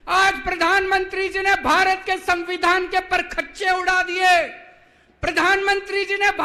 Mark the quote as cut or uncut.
uncut